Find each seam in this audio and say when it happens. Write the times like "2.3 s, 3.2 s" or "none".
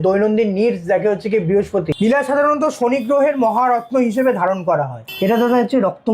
1.9 s, 5.0 s